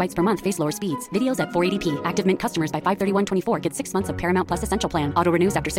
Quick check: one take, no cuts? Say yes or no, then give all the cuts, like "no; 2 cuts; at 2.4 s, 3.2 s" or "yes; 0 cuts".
yes; 0 cuts